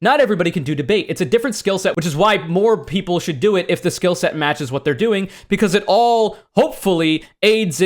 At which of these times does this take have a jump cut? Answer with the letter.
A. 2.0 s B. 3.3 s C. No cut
A